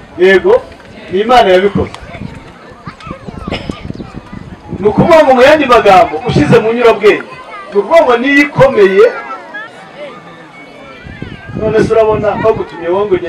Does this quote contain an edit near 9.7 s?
yes; 1 cut; at 9.7 s

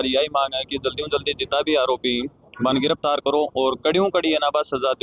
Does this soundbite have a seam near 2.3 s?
no; 0 cuts

